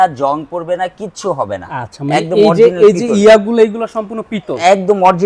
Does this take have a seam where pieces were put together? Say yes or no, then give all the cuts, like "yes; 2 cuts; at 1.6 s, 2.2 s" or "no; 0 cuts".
no; 0 cuts